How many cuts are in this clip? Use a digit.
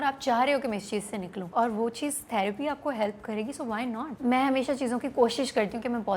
2